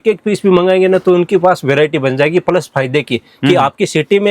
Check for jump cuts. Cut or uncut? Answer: uncut